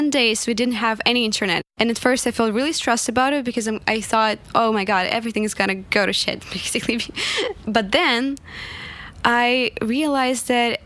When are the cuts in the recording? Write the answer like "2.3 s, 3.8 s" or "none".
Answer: 1.6 s, 5.8 s, 7.6 s